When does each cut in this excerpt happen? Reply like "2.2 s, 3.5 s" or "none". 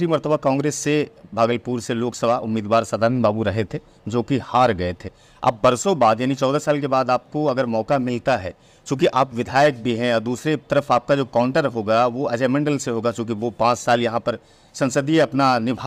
none